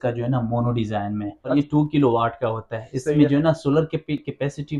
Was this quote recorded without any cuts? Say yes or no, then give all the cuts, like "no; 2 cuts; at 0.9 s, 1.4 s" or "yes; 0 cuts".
no; 1 cut; at 1.5 s